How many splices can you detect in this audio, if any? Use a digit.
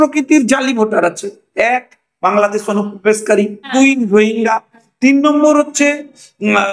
1